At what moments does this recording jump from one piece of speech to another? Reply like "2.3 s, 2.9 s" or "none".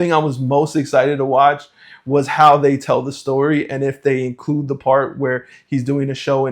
none